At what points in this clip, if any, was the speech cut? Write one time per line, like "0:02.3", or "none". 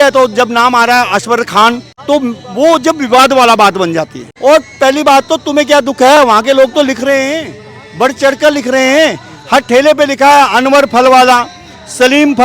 0:01.9
0:04.2